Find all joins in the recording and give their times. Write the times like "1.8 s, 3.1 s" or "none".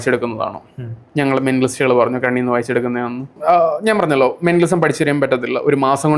3.4 s

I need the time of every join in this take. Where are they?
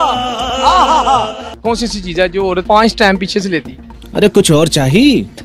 1.5 s, 2.6 s

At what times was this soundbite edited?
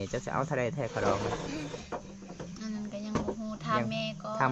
none

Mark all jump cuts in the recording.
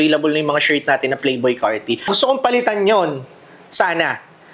2.1 s

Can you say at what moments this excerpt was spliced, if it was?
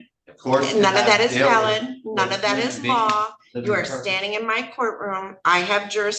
none

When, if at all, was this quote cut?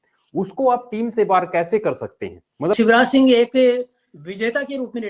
2.7 s

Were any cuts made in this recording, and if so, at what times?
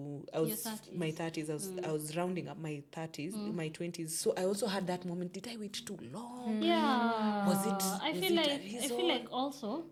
none

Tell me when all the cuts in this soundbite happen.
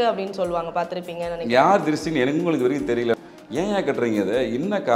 3.2 s

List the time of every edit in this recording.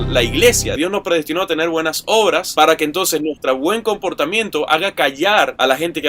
0.7 s, 2.5 s

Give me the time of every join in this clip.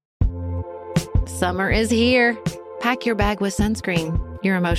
1.0 s

